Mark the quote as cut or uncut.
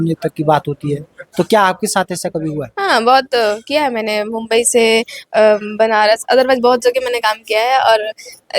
cut